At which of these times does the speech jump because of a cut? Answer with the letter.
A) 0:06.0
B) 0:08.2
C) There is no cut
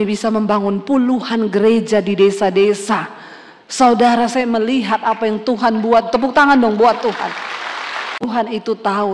B